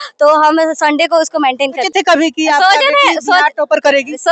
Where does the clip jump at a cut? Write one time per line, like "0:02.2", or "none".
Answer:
0:01.8